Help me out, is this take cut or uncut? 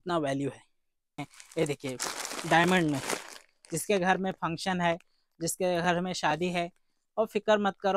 cut